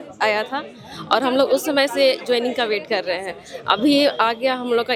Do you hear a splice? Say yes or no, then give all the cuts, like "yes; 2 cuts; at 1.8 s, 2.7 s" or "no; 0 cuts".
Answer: no; 0 cuts